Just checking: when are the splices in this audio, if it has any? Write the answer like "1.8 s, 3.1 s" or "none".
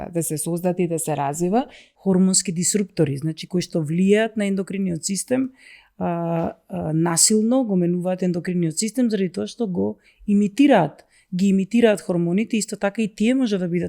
1.8 s